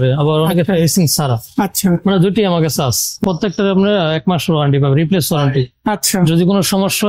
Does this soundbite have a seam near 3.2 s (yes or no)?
yes